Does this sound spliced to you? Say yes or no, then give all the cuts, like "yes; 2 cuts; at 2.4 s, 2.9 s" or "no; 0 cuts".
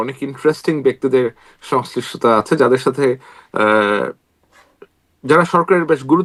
no; 0 cuts